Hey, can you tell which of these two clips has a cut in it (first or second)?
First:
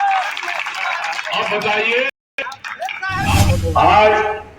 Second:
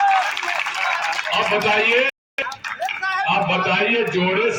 first